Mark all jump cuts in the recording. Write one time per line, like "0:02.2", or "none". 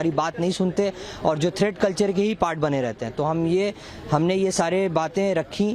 none